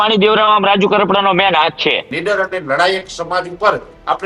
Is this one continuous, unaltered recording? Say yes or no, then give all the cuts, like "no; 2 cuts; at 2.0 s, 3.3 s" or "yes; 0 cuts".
no; 1 cut; at 2.1 s